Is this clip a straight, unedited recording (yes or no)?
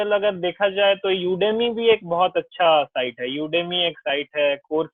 yes